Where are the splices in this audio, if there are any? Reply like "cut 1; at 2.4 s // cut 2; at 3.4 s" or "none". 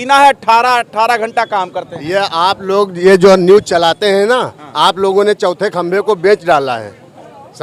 none